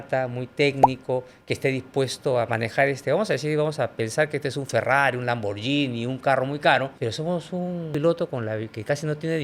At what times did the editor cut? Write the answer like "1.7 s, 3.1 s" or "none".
7.9 s